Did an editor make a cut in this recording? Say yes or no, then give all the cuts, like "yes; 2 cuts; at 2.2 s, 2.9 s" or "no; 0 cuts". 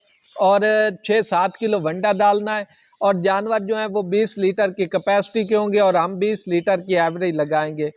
no; 0 cuts